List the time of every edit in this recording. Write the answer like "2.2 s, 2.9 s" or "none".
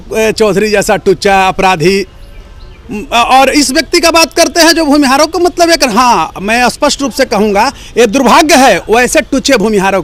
none